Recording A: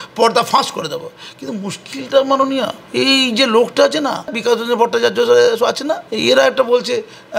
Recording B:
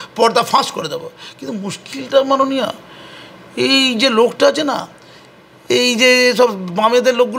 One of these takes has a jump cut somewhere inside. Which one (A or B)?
A